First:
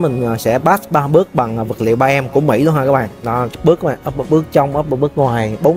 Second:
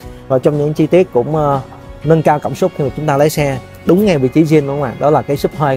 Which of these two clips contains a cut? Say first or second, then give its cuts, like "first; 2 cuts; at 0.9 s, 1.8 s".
first; 1 cut; at 3.5 s